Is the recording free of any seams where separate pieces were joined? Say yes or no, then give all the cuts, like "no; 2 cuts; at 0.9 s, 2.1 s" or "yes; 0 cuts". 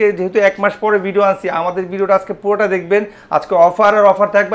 yes; 0 cuts